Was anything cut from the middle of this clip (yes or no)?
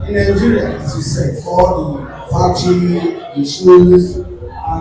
no